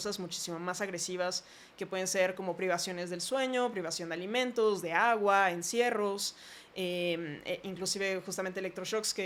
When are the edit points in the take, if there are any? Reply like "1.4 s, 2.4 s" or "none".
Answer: none